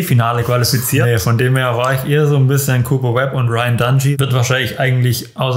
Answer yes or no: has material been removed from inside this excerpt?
yes